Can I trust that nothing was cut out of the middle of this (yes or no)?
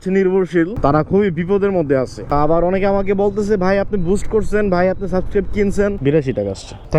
no